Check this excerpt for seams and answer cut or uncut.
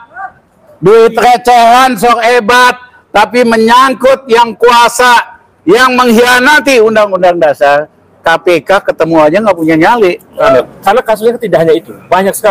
cut